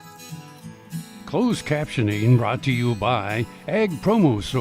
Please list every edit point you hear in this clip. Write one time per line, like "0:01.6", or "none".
0:01.2